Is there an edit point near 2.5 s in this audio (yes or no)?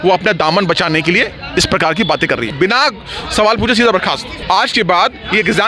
yes